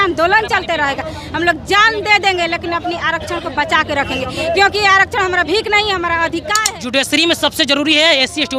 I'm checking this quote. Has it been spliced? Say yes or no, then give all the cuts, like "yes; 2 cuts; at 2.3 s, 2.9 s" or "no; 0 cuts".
yes; 1 cut; at 6.6 s